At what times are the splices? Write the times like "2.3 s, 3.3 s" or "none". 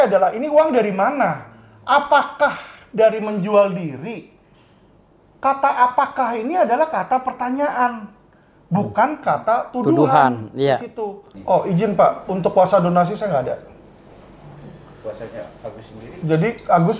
11.3 s